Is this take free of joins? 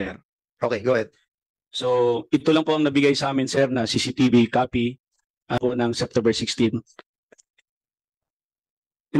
no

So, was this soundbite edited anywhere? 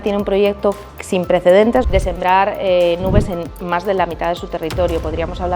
yes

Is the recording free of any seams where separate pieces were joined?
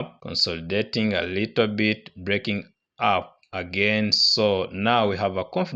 yes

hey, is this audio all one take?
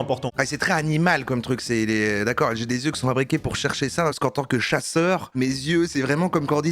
no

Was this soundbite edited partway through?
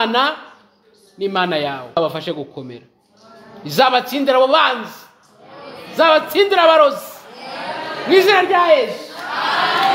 yes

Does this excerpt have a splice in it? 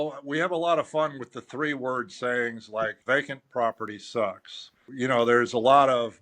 yes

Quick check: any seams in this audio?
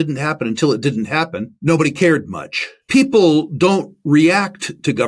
yes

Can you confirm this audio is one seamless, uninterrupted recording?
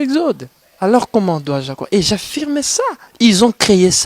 no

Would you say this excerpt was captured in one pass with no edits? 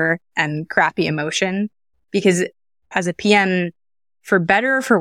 no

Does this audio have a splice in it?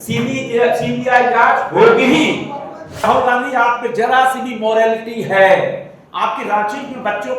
yes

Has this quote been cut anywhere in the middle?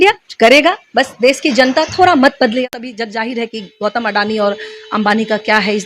yes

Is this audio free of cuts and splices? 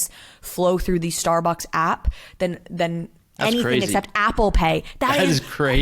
yes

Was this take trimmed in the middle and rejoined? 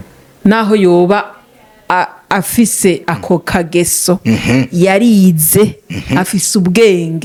no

